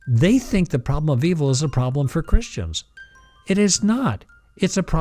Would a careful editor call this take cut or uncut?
uncut